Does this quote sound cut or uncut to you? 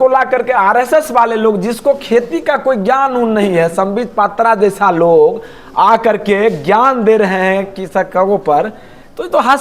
uncut